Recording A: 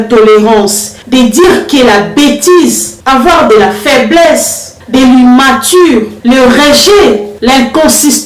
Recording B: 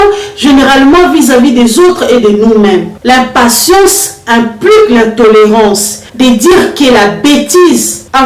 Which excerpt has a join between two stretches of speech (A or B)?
B